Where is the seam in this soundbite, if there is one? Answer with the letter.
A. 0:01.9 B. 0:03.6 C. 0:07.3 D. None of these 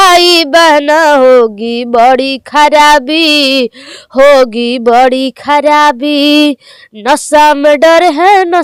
D